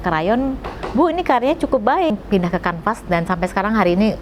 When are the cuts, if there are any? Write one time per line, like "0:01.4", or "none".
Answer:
0:02.1